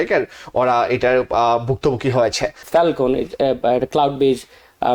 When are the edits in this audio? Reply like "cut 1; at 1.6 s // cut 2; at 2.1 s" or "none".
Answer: cut 1; at 2.5 s